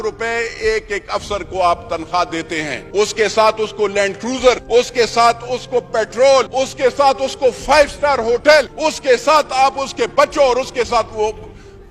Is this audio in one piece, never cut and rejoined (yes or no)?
no